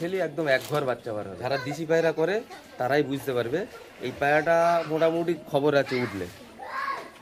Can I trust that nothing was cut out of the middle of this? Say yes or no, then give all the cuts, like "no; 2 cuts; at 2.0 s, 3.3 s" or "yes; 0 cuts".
no; 1 cut; at 1.3 s